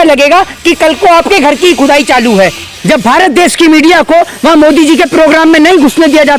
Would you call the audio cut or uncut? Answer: cut